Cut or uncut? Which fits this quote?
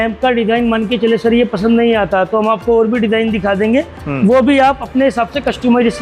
uncut